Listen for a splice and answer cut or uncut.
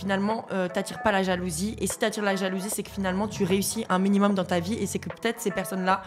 uncut